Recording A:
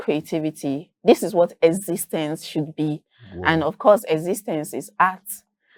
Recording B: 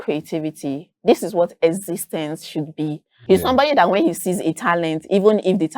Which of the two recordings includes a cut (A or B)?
B